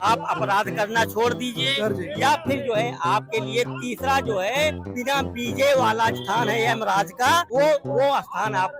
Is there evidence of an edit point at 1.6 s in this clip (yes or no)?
no